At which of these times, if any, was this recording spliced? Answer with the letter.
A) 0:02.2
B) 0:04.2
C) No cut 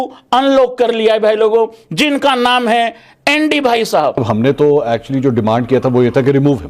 B